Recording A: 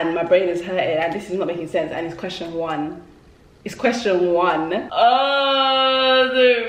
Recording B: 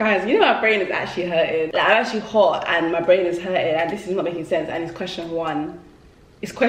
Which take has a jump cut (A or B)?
A